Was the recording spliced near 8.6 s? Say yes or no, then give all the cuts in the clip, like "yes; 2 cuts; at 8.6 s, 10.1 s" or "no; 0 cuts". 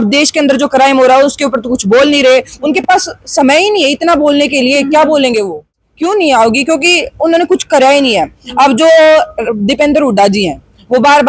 no; 1 cut; at 5.9 s